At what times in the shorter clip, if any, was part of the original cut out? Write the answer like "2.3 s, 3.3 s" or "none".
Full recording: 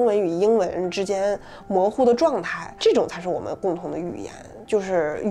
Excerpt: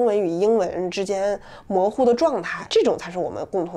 2.6 s